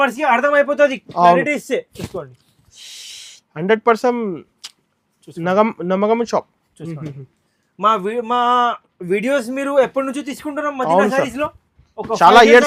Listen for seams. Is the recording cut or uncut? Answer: uncut